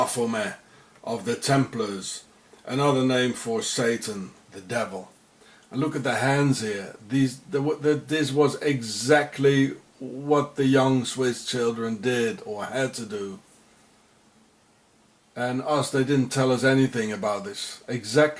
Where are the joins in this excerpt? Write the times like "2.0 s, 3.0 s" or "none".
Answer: 2.7 s